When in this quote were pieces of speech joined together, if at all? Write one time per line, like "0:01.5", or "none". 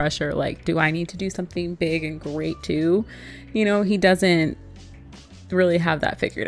none